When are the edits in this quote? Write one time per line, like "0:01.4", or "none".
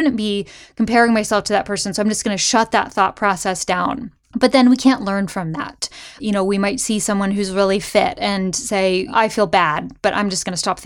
0:06.2
0:09.1